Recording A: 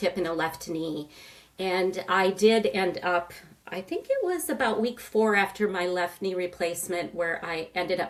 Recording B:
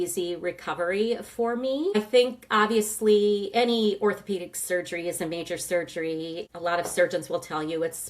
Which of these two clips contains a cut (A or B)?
B